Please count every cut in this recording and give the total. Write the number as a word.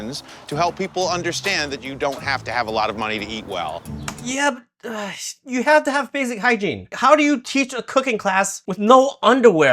two